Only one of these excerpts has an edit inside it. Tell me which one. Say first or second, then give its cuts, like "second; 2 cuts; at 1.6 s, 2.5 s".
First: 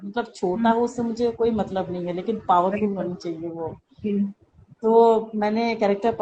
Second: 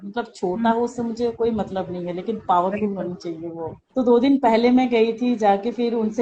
second; 1 cut; at 3.8 s